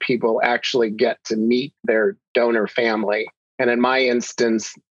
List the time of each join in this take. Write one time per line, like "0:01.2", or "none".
0:03.4